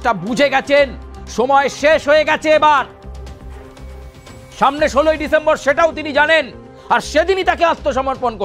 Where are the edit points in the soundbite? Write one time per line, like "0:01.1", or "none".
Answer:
0:02.9
0:04.5